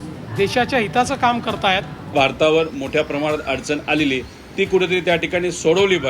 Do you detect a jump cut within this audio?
yes; 1 cut; at 2.1 s

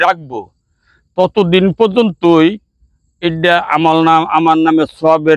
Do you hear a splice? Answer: no; 0 cuts

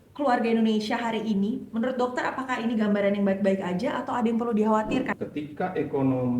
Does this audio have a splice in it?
yes; 1 cut; at 5.1 s

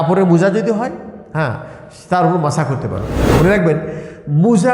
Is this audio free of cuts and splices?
no; 1 cut; at 3.1 s

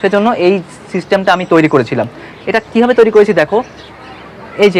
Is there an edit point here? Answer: no; 0 cuts

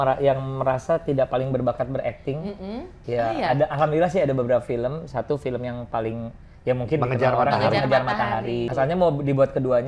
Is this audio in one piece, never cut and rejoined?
no; 2 cuts; at 2.9 s, 8.7 s

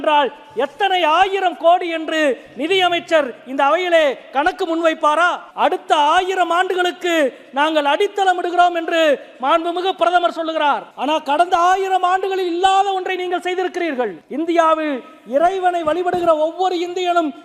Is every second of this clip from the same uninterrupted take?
no; 3 cuts; at 5.4 s, 10.9 s, 14.2 s

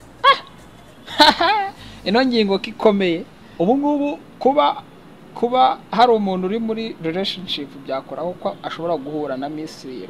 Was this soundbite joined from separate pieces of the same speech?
yes; 1 cut; at 3.4 s

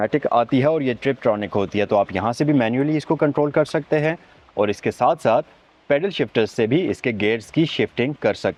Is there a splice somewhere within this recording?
no; 0 cuts

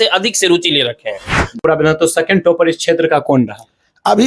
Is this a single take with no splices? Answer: no; 1 cut; at 1.6 s

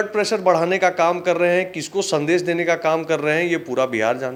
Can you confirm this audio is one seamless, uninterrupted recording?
yes; 0 cuts

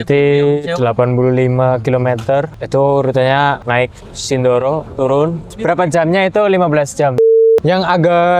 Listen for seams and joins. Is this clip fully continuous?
no; 4 cuts; at 2.6 s, 3.6 s, 5.5 s, 7.3 s

